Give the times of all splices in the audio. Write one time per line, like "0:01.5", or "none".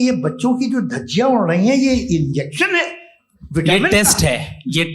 none